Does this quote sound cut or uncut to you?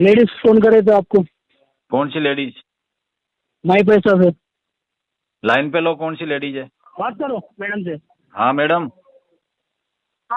cut